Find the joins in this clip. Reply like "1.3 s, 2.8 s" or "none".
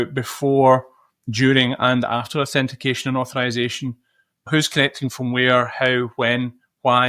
4.5 s